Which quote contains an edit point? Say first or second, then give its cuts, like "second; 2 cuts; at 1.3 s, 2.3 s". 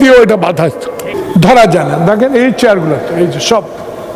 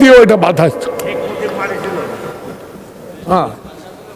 first; 1 cut; at 1.1 s